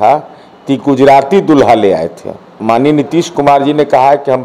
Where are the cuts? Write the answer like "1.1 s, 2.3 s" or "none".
2.5 s